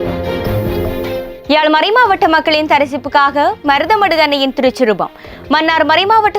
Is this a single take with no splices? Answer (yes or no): no